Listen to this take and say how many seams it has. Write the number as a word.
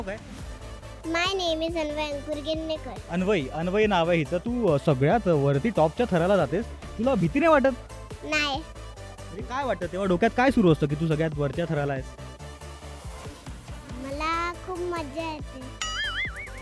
one